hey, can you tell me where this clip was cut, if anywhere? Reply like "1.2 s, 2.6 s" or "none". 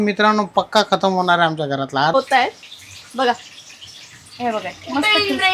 2.1 s